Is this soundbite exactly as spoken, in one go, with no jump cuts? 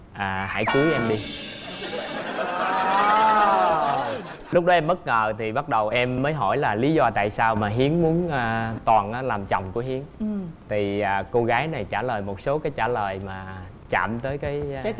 no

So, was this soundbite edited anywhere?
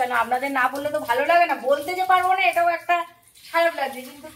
no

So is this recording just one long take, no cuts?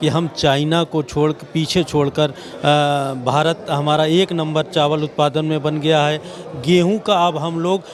yes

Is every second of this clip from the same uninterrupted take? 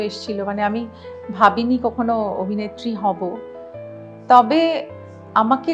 yes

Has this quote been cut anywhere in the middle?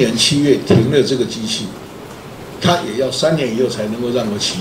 no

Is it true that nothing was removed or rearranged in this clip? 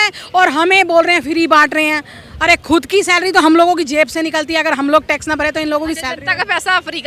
yes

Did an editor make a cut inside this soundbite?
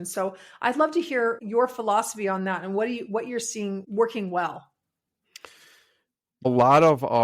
yes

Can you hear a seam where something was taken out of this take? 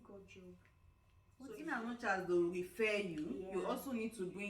yes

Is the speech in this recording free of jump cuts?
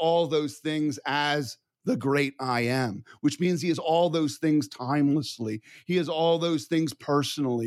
yes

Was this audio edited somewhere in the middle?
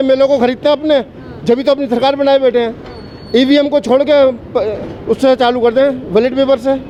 no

